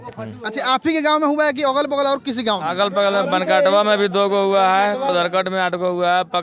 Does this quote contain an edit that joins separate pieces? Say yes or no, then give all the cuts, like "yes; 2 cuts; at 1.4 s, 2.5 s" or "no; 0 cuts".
no; 0 cuts